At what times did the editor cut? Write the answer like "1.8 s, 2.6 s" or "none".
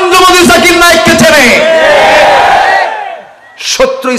none

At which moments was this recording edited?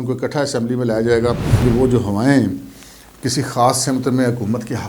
1.6 s

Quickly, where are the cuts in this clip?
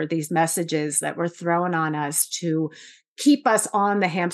none

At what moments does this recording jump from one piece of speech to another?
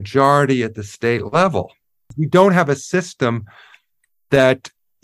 2.2 s

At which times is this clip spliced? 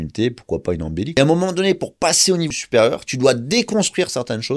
1.2 s, 2.6 s

